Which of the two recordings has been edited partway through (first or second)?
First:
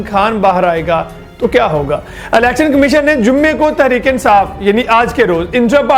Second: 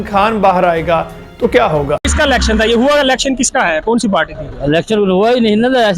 second